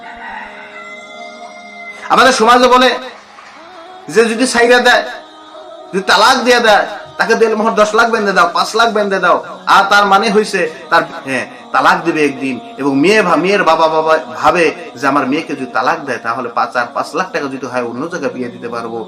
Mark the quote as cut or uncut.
uncut